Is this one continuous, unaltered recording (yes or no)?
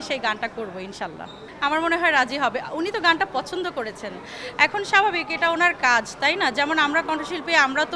yes